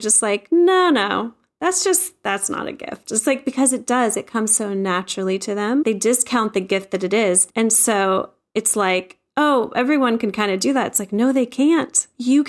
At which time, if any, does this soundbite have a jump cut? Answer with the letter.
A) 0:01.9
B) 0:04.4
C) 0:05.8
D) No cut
C